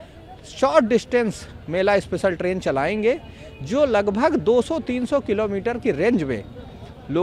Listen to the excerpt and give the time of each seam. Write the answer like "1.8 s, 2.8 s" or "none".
none